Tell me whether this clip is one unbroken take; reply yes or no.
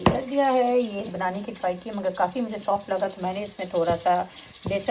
yes